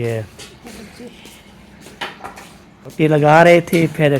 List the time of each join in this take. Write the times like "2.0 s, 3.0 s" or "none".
2.9 s